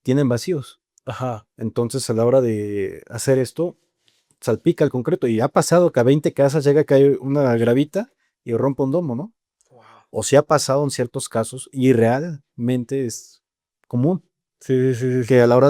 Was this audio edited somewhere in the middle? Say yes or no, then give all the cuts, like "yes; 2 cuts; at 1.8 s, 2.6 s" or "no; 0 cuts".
no; 0 cuts